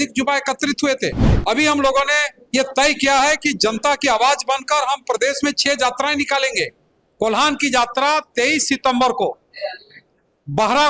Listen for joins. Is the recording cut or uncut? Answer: cut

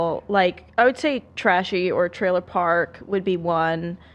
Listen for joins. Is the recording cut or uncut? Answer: uncut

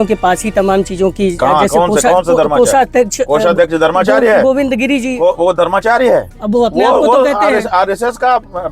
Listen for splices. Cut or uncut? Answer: uncut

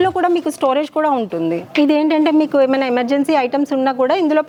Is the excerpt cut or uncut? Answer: uncut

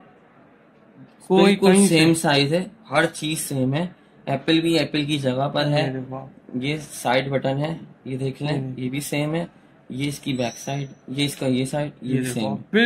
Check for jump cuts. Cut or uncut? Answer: uncut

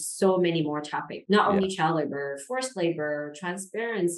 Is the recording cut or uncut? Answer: uncut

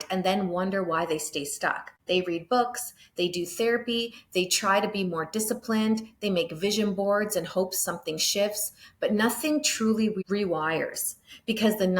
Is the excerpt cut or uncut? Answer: cut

